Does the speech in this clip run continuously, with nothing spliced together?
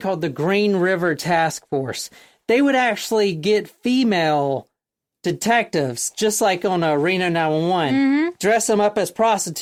yes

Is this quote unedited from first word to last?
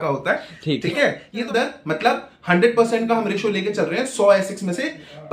no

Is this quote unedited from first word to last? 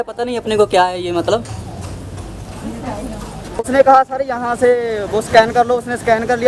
no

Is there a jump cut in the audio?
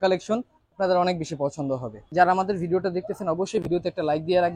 yes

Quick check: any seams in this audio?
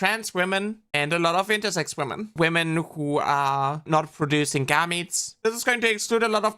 yes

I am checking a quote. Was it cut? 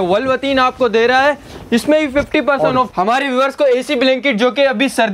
yes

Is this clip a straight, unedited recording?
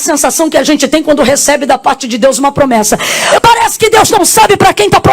no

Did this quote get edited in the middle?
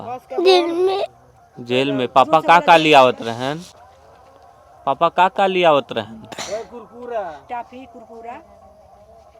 no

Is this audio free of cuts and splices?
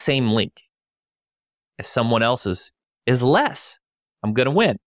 yes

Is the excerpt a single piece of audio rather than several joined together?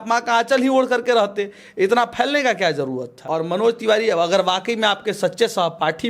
no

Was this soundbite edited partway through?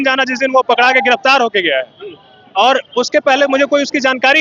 no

